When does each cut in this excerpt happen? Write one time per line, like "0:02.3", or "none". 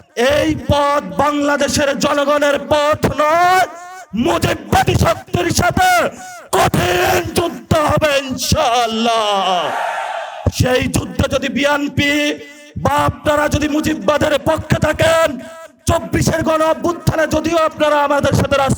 none